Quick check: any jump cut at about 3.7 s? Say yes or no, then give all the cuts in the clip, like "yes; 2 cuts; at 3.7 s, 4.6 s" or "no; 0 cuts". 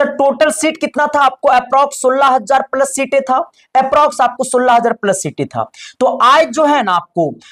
no; 0 cuts